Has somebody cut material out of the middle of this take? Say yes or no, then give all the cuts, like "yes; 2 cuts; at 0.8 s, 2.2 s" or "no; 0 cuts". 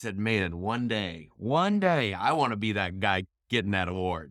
no; 0 cuts